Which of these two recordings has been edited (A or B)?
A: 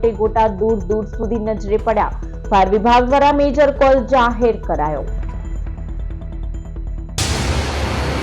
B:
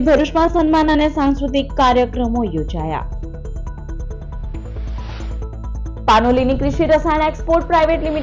A